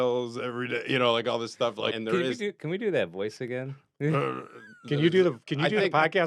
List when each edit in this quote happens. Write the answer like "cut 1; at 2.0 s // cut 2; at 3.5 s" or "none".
cut 1; at 2.0 s